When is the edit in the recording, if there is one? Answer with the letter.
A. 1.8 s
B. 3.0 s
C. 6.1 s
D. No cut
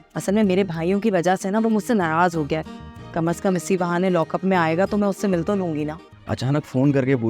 C